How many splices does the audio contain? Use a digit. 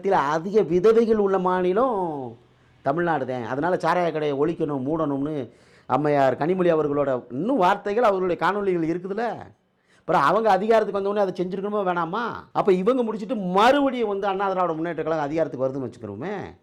0